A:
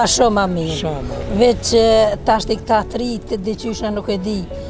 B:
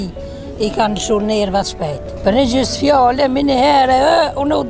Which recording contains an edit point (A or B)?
B